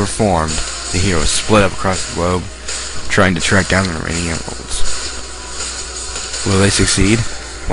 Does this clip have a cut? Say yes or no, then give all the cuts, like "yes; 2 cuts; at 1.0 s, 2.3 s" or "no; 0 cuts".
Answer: yes; 1 cut; at 6.8 s